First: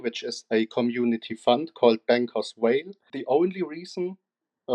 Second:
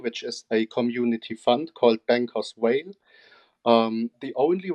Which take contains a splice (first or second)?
first